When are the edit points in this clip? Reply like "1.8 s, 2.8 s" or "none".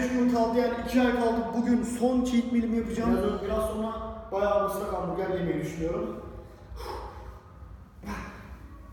3.2 s